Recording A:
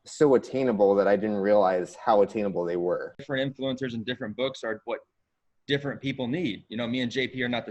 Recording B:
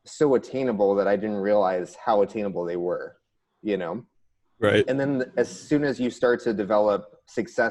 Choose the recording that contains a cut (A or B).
A